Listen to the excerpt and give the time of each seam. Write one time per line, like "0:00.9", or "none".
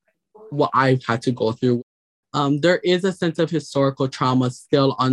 0:01.8